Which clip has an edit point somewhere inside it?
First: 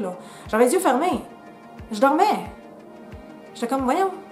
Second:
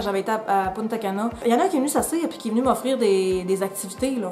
second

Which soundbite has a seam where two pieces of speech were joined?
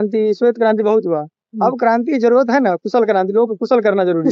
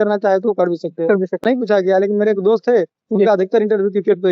second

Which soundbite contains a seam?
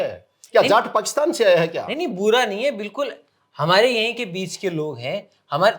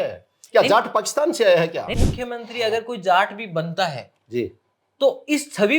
second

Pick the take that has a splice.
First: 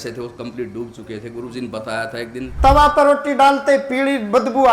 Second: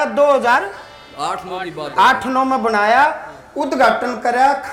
first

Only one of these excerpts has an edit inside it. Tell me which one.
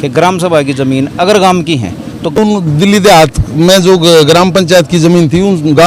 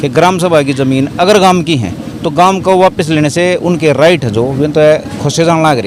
first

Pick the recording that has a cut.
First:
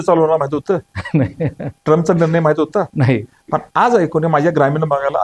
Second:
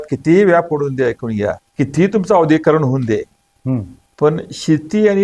second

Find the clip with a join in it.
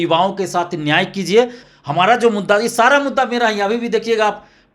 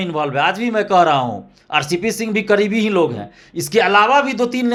first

